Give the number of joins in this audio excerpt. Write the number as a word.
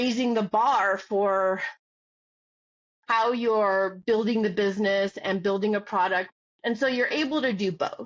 one